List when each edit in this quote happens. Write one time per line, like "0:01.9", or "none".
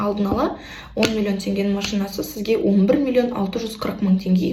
none